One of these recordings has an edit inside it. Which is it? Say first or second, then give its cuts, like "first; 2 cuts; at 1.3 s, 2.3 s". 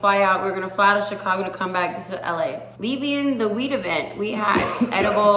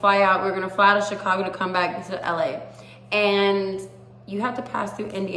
first; 1 cut; at 2.7 s